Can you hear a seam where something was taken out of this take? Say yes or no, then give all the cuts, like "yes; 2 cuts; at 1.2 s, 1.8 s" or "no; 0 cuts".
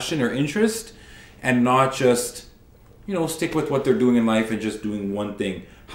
no; 0 cuts